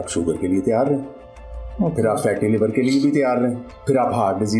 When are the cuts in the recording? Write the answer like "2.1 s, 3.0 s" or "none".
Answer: 3.7 s